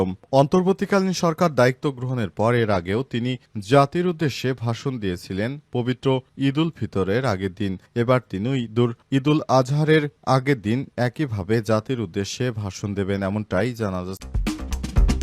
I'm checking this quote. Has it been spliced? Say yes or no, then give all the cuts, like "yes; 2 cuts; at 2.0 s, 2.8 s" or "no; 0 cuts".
yes; 1 cut; at 14.2 s